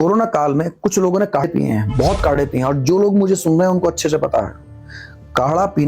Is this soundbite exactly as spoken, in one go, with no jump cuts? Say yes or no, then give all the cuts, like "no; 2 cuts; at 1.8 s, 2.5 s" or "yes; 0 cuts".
no; 1 cut; at 1.4 s